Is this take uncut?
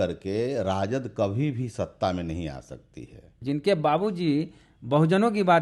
no; 1 cut; at 3.3 s

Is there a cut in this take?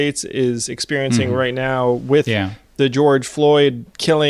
no; 0 cuts

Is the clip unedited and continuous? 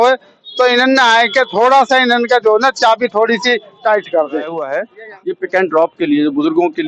no; 1 cut; at 4.7 s

